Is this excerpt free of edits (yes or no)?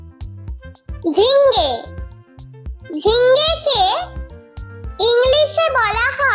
no